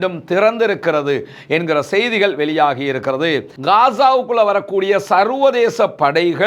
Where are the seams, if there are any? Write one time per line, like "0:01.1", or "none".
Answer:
0:03.5